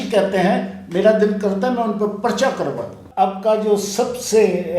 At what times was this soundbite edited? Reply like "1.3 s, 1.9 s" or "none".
3.0 s